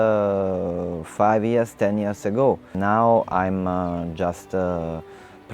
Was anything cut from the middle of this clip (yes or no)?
yes